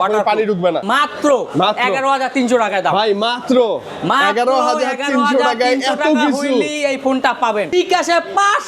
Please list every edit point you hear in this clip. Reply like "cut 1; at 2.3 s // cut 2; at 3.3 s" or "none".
cut 1; at 0.8 s // cut 2; at 7.7 s